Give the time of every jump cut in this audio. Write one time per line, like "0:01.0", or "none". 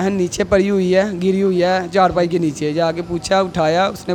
none

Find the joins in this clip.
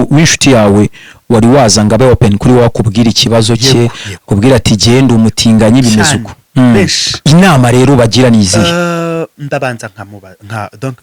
none

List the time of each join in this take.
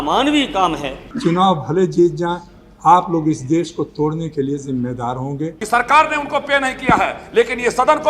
0:01.0
0:05.5

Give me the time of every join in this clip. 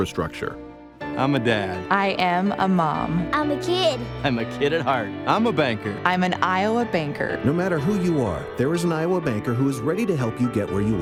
none

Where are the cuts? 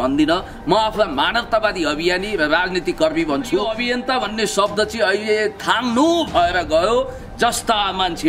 0:03.7

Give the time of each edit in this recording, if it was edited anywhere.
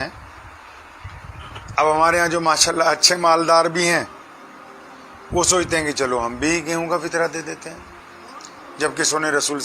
0:01.6

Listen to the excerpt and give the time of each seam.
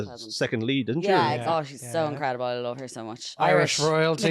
0:01.4

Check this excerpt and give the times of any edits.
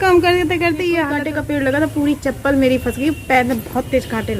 0:01.2

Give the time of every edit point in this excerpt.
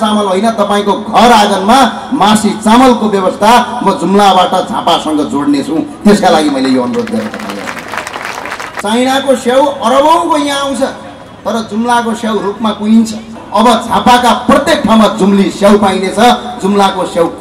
0:08.8
0:13.4

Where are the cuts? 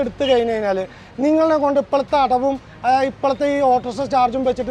none

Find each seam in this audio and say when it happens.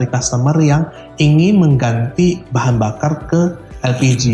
none

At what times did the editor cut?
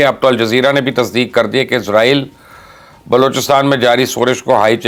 none

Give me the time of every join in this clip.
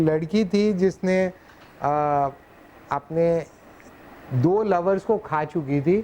none

